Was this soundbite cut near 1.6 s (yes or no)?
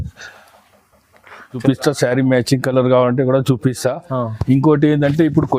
yes